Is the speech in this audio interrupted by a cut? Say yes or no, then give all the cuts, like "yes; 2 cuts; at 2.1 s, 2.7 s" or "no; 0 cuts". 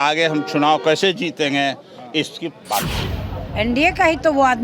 yes; 1 cut; at 3.0 s